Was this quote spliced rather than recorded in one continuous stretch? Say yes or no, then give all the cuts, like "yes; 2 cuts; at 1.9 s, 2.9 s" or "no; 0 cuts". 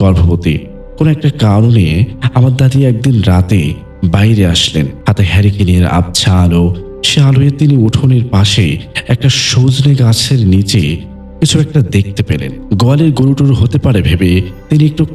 no; 0 cuts